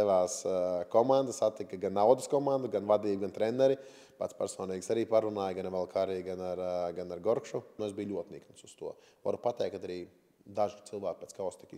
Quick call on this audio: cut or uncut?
cut